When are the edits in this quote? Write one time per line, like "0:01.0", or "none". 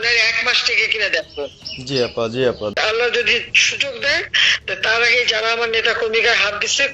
0:02.7